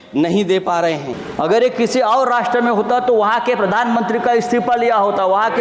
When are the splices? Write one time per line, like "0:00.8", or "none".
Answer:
0:01.1